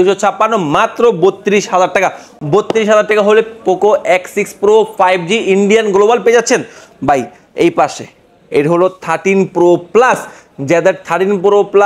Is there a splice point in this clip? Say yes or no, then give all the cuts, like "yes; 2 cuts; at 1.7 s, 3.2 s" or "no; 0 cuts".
no; 0 cuts